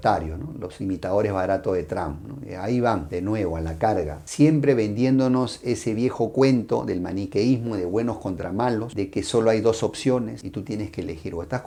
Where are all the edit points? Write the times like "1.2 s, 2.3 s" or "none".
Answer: none